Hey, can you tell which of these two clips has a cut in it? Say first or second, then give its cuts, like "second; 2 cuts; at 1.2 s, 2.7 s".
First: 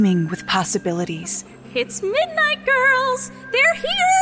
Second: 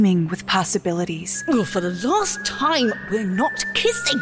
second; 1 cut; at 1.4 s